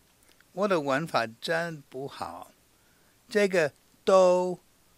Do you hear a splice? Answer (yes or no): no